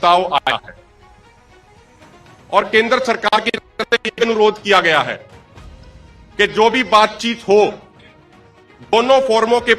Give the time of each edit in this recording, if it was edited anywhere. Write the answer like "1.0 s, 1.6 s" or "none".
none

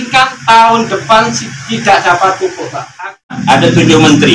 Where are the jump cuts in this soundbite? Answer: 3.4 s

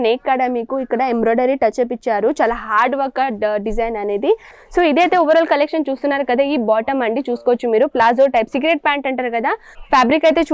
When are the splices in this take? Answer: 4.5 s, 9.7 s

